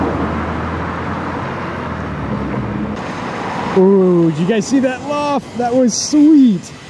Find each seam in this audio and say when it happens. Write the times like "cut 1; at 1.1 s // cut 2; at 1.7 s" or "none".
cut 1; at 2.3 s